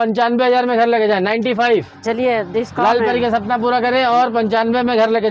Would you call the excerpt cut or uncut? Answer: uncut